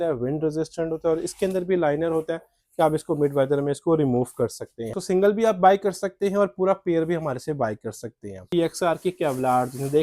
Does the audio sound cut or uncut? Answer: cut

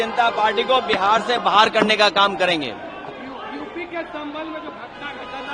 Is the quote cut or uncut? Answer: uncut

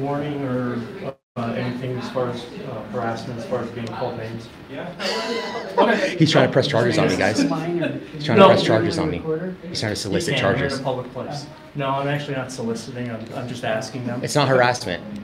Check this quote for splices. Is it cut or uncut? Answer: uncut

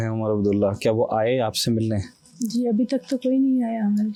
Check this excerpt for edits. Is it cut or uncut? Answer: uncut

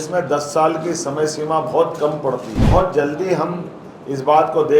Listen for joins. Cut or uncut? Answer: cut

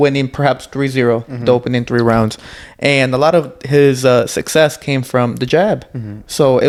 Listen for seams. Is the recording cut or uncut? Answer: uncut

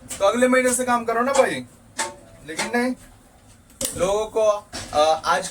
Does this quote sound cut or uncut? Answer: uncut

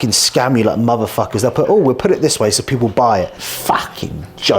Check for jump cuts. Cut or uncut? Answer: cut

